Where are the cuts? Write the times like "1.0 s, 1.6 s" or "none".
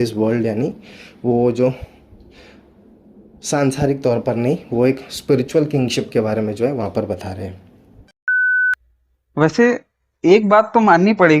8.5 s